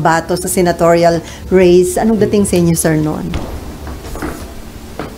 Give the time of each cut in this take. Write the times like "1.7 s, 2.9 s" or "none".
3.3 s